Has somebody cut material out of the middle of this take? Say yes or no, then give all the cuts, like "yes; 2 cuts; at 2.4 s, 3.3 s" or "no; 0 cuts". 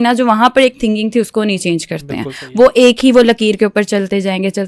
no; 0 cuts